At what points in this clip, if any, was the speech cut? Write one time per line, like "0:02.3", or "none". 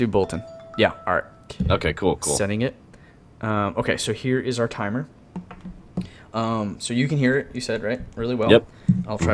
0:04.5